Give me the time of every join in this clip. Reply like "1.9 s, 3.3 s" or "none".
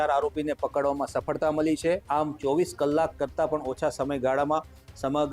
2.0 s